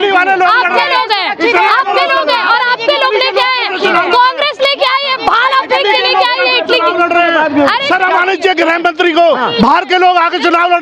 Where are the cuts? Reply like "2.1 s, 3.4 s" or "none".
none